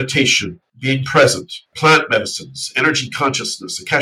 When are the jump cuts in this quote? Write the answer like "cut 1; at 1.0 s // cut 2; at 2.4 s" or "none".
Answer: cut 1; at 1.7 s